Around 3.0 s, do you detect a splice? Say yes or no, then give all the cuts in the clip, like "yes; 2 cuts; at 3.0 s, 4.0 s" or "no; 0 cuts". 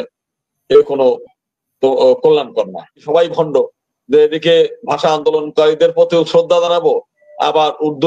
yes; 1 cut; at 3.0 s